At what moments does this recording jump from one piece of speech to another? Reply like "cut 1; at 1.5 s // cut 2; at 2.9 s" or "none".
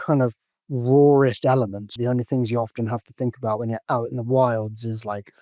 cut 1; at 1.9 s